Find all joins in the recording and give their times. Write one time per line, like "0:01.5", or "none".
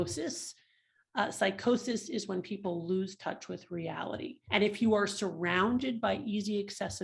0:04.4